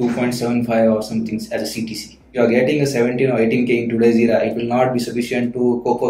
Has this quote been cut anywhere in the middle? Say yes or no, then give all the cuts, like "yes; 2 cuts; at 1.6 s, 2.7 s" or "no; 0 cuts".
yes; 1 cut; at 2.3 s